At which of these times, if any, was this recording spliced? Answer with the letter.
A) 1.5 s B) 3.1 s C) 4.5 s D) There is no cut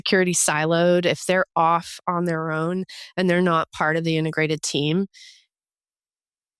D